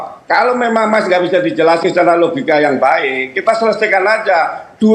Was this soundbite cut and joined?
no; 0 cuts

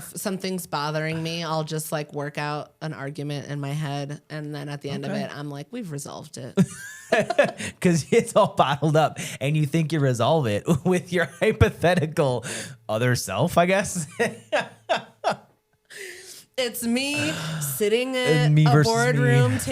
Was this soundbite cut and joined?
yes; 1 cut; at 7.0 s

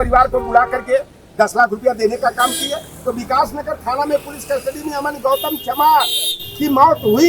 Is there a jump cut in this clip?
no; 0 cuts

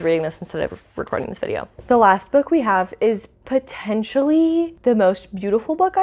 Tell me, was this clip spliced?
yes; 2 cuts; at 1.7 s, 4.7 s

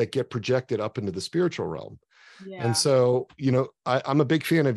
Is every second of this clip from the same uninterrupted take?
yes; 0 cuts

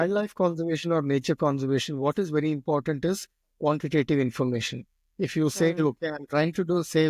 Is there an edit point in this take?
no; 0 cuts

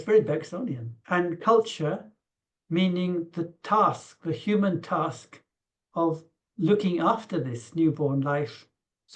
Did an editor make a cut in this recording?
yes; 1 cut; at 1.0 s

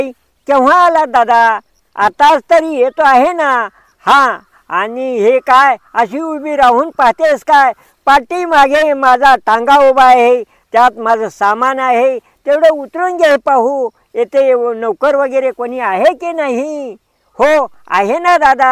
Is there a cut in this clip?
no; 0 cuts

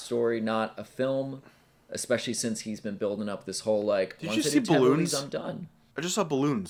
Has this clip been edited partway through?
no; 0 cuts

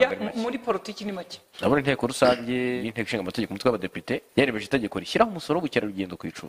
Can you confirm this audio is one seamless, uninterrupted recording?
no; 3 cuts; at 1.5 s, 2.8 s, 4.3 s

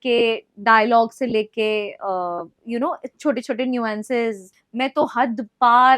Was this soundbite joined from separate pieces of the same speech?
yes; 1 cut; at 4.6 s

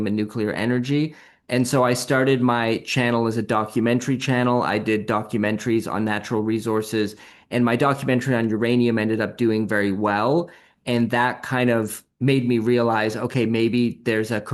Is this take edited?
no; 0 cuts

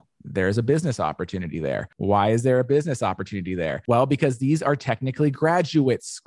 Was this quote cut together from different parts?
yes; 2 cuts; at 1.9 s, 3.8 s

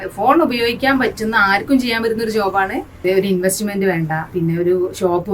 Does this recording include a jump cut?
yes; 2 cuts; at 2.9 s, 4.2 s

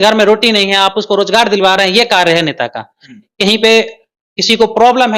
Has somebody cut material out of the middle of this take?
no; 0 cuts

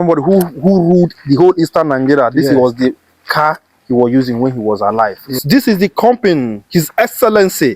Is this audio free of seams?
no; 1 cut; at 5.3 s

